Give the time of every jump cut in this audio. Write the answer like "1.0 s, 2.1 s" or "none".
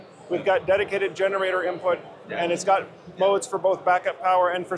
none

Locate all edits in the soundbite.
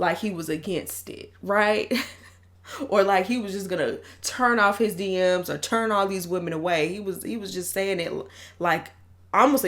none

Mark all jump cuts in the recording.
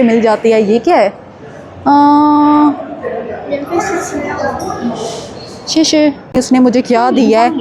6.4 s

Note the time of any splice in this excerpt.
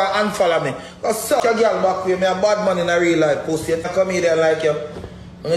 1.4 s, 3.9 s

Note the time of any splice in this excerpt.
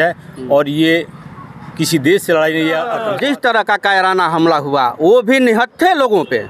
3.0 s

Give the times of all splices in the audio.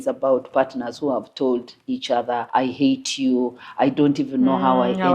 2.5 s

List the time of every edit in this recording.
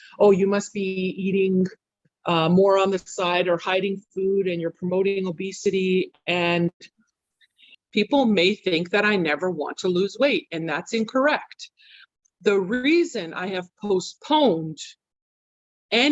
7.8 s

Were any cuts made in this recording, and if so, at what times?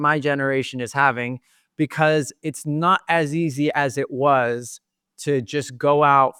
none

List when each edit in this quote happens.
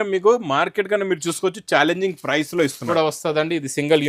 2.8 s

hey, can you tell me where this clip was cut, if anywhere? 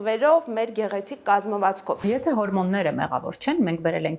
2.0 s

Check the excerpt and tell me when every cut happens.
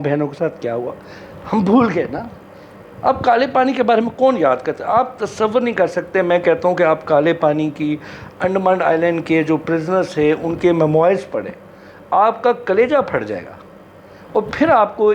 none

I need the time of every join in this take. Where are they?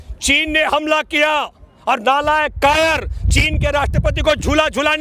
none

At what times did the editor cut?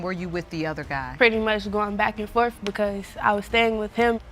none

